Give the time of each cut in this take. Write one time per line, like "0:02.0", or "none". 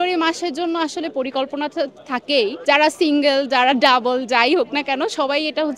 0:02.6